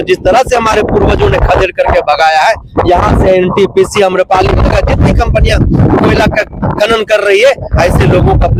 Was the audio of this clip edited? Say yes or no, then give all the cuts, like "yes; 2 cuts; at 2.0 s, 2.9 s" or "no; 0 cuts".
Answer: no; 0 cuts